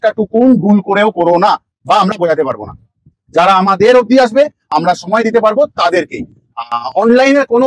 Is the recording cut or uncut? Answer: uncut